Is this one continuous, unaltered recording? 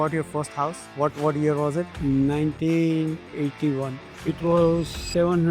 no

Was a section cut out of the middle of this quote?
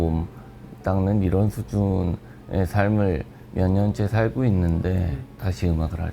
yes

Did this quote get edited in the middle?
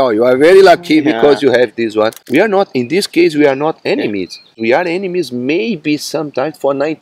yes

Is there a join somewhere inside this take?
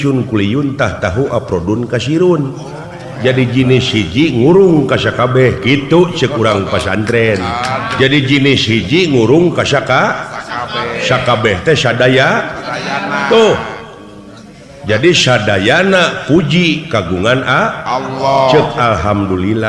yes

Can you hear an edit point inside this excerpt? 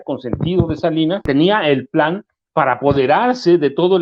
yes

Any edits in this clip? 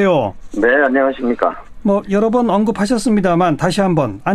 no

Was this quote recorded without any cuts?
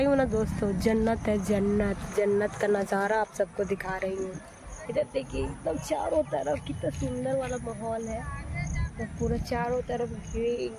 yes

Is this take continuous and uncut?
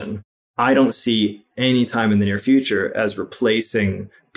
yes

